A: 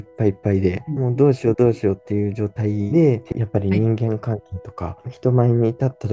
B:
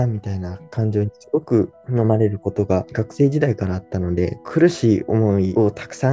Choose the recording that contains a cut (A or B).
A